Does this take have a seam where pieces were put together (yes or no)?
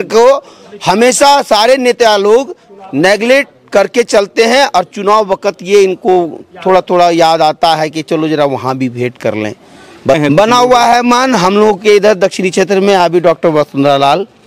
yes